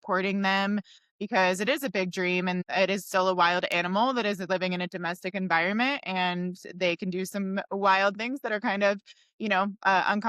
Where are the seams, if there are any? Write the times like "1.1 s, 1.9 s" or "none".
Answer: 2.6 s